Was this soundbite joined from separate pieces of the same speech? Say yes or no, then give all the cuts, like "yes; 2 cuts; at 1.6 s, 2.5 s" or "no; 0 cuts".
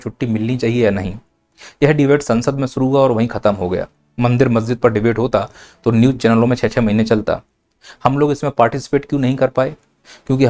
no; 0 cuts